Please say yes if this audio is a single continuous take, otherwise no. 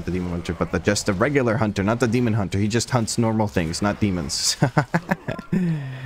yes